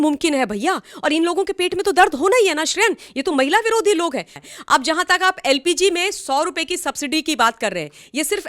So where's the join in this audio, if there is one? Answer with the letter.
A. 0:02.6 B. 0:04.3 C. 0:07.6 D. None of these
B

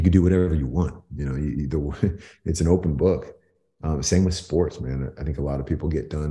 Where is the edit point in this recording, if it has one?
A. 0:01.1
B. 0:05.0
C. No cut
C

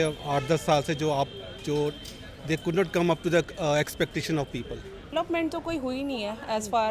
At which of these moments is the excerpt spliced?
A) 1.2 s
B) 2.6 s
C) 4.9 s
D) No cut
C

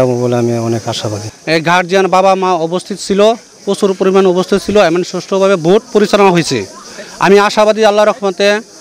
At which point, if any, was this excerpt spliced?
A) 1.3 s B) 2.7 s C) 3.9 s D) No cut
A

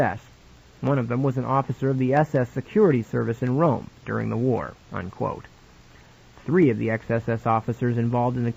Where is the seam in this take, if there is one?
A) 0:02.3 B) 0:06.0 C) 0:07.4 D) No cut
C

